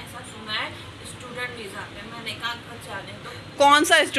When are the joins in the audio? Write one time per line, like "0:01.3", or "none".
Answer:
none